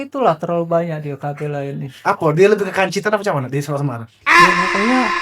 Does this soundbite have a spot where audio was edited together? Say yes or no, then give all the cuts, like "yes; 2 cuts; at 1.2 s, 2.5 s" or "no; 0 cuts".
yes; 1 cut; at 4.1 s